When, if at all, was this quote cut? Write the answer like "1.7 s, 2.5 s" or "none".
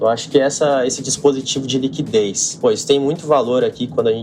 2.5 s